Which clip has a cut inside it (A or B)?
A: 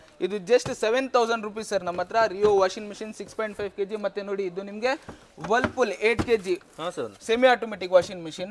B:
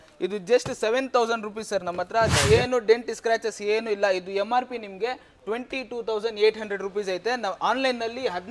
B